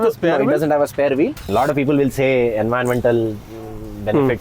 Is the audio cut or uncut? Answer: cut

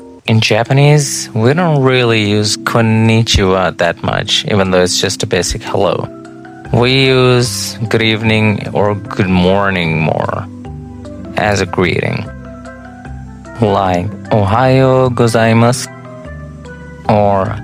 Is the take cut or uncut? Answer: uncut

